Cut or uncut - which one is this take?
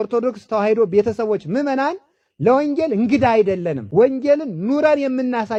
uncut